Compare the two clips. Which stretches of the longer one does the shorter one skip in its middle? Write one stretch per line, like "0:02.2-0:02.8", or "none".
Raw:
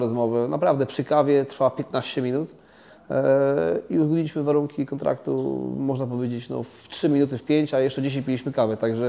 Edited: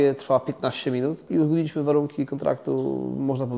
0:02.6-0:03.8

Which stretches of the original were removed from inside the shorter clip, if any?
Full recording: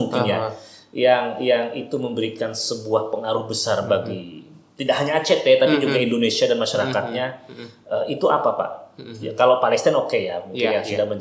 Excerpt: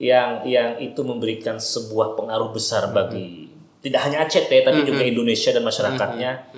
none

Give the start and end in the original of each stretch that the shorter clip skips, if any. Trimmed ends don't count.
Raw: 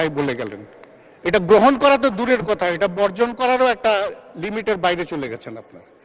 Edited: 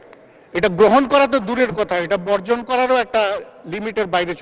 none

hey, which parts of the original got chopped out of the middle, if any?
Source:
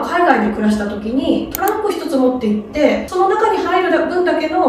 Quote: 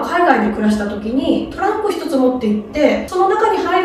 none

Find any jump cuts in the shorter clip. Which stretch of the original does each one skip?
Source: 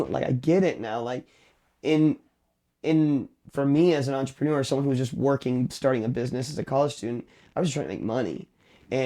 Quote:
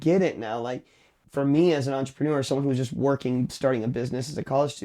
0:01.6-0:03.4

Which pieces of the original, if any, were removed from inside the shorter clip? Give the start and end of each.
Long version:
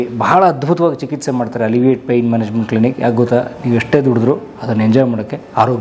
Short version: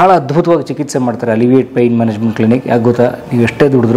none

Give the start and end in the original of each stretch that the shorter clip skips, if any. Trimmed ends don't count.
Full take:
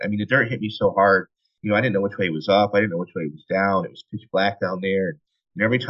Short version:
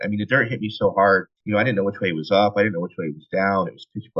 0:01.3-0:01.5

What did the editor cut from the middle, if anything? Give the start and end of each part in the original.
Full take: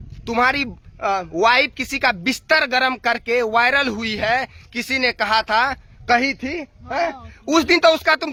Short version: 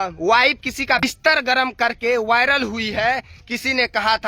0:02.1-0:02.2

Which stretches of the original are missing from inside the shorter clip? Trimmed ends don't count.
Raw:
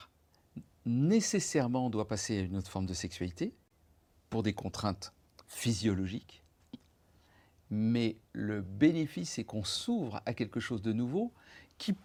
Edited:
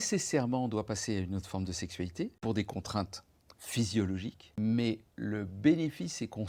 0:03.6-0:04.2
0:06.3-0:07.6

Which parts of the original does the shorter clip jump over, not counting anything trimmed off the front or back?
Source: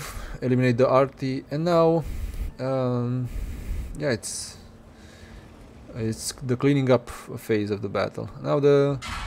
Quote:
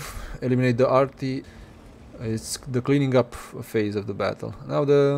0:01.5-0:05.2

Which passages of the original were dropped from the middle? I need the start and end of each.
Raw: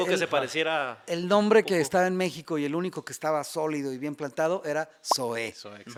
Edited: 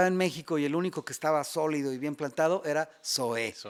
none

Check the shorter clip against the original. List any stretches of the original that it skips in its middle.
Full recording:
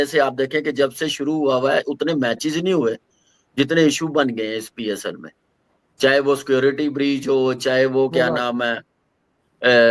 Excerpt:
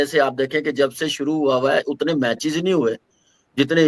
none

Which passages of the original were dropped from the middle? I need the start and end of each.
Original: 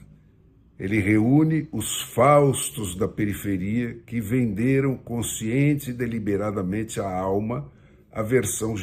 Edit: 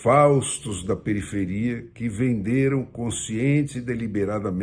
none

